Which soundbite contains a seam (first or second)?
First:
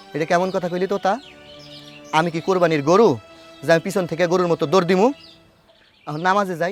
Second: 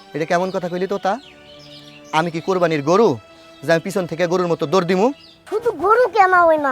second